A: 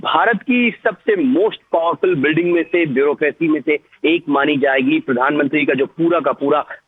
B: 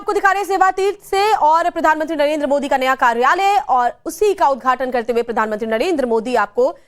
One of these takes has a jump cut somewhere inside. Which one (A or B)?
B